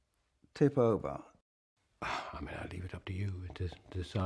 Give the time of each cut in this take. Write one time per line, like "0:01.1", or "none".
0:01.3